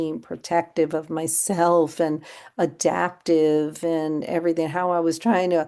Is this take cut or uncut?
uncut